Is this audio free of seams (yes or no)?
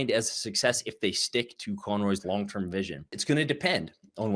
no